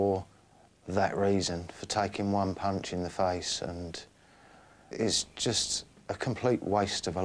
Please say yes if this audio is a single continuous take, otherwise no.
no